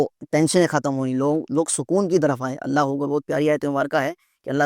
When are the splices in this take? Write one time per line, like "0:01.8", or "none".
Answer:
none

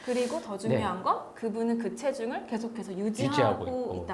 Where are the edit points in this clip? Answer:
none

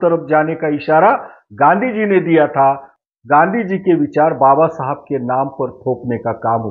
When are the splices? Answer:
0:02.9

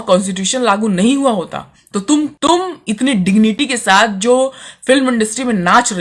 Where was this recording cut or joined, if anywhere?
0:02.3

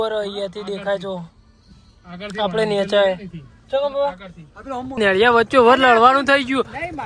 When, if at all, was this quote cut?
0:05.0

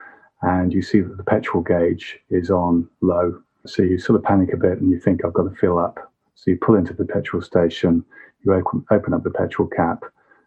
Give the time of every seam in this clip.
0:03.6

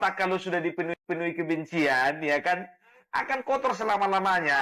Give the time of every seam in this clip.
none

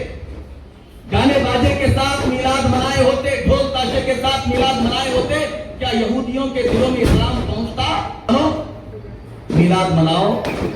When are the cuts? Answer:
0:08.3

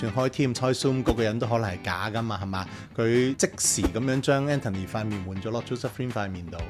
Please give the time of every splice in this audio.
0:03.4

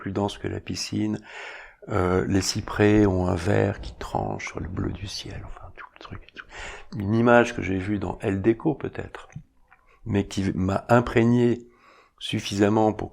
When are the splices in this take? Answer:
none

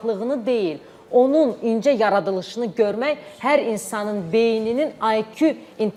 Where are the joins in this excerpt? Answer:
none

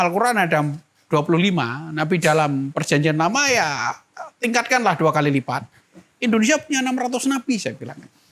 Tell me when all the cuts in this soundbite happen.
none

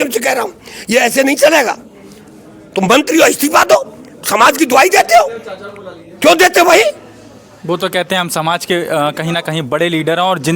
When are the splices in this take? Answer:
none

